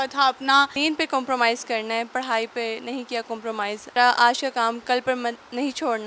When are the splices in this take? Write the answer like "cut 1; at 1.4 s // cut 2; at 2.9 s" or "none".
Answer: cut 1; at 0.7 s // cut 2; at 3.9 s